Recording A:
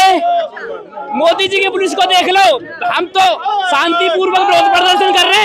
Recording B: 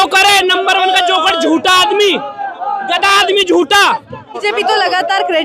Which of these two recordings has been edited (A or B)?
B